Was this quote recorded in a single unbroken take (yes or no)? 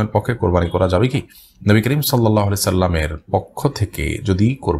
yes